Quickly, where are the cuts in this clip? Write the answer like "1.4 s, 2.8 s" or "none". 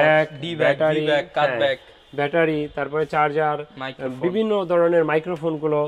none